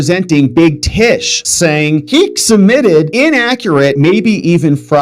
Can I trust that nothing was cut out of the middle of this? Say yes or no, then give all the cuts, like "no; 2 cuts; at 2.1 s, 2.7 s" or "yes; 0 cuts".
yes; 0 cuts